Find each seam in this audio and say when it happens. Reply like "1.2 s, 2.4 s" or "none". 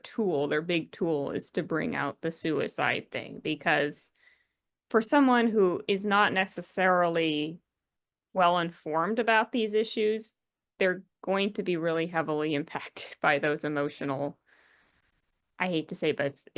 none